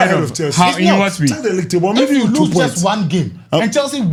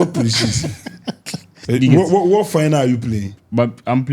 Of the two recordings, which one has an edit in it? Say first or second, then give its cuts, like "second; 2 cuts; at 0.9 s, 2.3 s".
second; 1 cut; at 1.5 s